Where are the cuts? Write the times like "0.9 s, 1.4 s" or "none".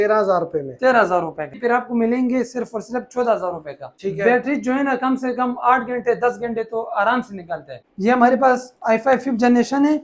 1.6 s, 3.9 s, 7.8 s